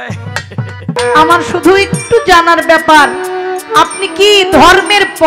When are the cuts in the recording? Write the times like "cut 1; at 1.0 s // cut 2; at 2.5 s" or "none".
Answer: cut 1; at 1.0 s

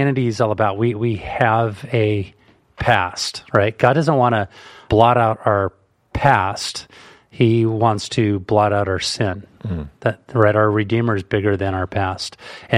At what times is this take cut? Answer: cut 1; at 4.8 s

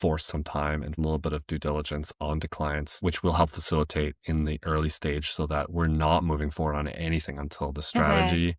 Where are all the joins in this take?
cut 1; at 0.9 s // cut 2; at 2.9 s

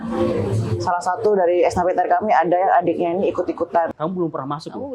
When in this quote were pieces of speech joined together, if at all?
cut 1; at 3.9 s

